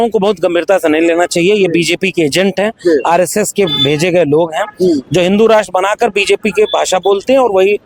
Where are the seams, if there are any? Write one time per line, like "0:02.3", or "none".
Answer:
none